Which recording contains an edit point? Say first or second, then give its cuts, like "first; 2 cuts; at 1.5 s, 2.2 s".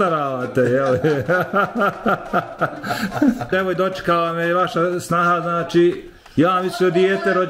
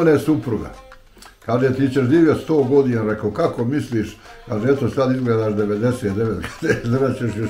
first; 1 cut; at 3.5 s